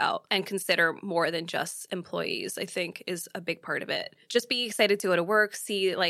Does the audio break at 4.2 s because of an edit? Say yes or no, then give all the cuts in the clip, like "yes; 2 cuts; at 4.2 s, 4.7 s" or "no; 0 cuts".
yes; 1 cut; at 4.2 s